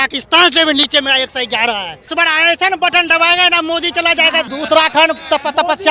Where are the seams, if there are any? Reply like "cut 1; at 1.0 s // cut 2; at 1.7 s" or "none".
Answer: cut 1; at 2.1 s // cut 2; at 4.5 s